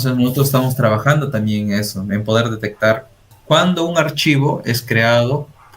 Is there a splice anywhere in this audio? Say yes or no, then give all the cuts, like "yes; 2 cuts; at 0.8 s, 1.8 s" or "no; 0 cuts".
yes; 1 cut; at 3.3 s